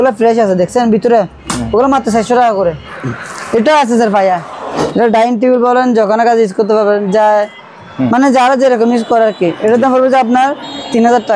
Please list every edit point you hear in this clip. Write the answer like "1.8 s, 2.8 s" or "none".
2.9 s, 4.8 s